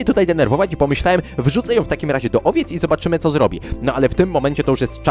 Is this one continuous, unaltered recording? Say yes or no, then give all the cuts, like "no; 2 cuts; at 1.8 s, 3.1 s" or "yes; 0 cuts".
no; 1 cut; at 3.7 s